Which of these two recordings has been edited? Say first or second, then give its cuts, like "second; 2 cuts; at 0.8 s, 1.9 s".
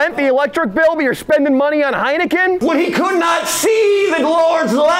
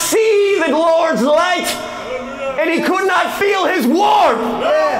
first; 1 cut; at 2.6 s